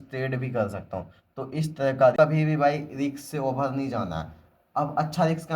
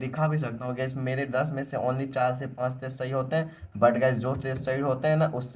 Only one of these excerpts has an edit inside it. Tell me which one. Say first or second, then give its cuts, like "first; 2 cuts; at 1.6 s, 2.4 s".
first; 1 cut; at 2.1 s